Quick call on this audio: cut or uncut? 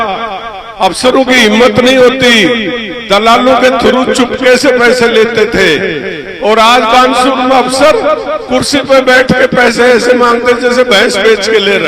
uncut